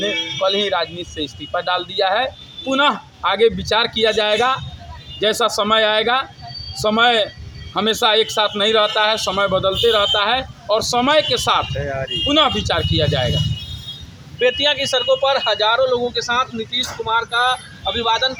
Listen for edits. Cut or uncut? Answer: uncut